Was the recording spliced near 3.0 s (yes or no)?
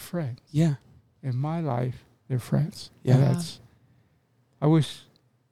no